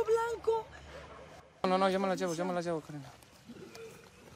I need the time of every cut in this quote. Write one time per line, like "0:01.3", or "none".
0:01.6